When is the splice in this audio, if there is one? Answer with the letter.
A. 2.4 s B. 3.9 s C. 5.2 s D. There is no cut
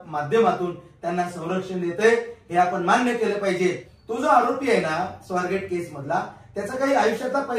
B